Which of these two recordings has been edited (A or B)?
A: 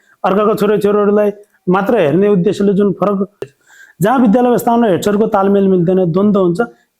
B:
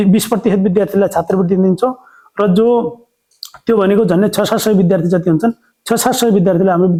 A